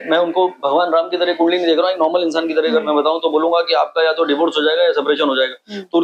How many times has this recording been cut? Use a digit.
0